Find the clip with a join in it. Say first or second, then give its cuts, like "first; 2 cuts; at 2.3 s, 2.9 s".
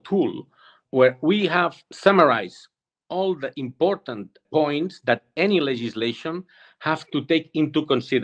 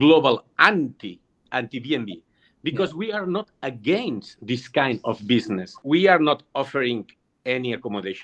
second; 2 cuts; at 1.4 s, 5.8 s